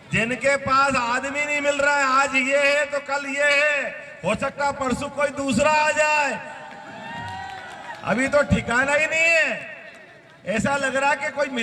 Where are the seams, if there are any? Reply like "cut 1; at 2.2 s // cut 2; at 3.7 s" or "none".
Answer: none